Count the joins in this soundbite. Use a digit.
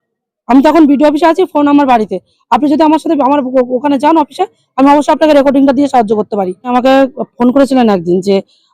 1